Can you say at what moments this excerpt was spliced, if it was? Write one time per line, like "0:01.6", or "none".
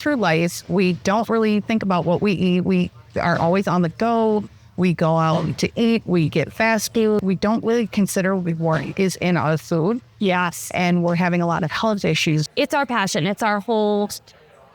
0:12.5